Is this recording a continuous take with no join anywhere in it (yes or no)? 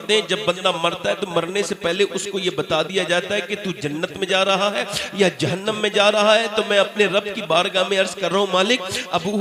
yes